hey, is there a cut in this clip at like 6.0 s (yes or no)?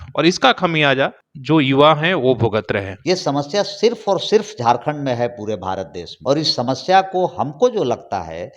yes